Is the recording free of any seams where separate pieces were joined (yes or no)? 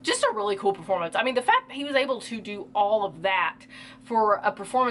yes